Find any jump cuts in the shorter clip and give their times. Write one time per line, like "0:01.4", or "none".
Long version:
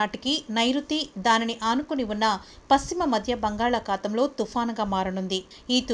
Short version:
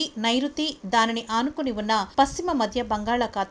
0:02.1